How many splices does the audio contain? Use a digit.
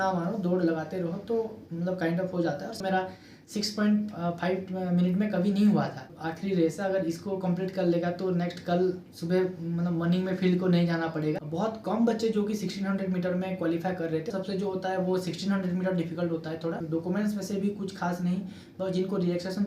5